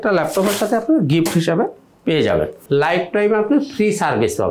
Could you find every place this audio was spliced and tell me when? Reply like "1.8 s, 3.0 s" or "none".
2.6 s